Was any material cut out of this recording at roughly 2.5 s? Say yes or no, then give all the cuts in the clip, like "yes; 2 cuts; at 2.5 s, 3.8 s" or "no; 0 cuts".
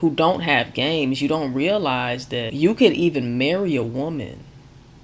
yes; 1 cut; at 2.5 s